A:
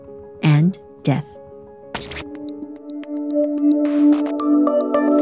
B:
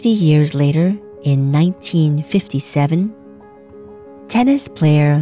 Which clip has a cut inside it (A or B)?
A